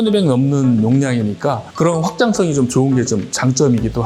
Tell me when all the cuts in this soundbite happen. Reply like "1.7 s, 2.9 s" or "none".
none